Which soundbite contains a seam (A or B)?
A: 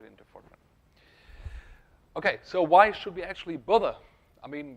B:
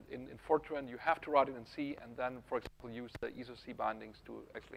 A